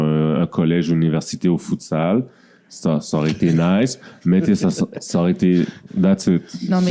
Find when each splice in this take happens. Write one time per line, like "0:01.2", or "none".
none